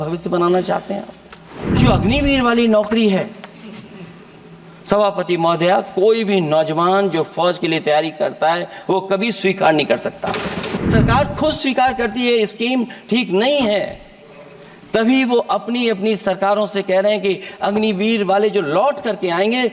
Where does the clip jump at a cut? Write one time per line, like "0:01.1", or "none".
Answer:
0:01.8
0:10.8